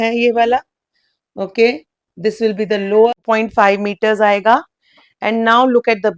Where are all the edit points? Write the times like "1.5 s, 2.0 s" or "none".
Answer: 3.1 s